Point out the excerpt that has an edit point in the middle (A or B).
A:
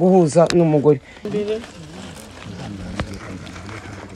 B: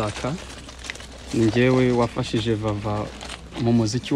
A